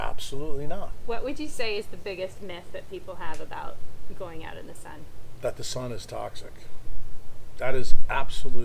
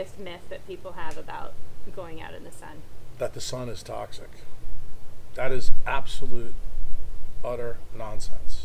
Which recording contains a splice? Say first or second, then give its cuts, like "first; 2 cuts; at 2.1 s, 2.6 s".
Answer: first; 1 cut; at 1.0 s